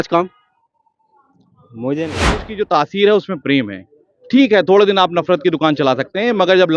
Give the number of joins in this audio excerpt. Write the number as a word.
one